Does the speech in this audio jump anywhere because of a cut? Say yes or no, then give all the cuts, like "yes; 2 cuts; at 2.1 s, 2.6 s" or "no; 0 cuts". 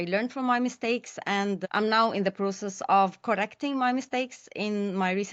no; 0 cuts